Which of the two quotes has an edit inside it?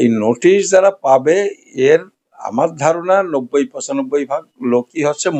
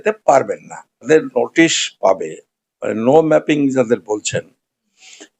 second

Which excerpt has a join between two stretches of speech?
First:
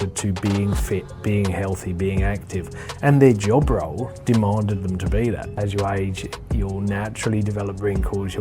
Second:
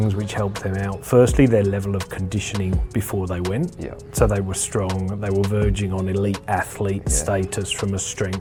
first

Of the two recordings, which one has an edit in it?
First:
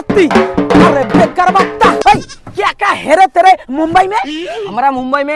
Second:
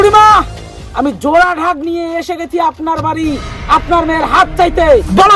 first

